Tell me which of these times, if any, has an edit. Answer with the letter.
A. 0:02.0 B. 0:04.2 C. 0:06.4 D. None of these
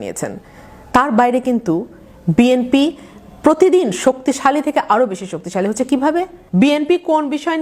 C